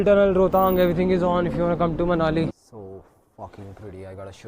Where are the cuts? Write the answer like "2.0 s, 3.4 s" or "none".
2.5 s